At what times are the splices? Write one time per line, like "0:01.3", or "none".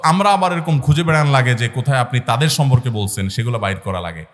none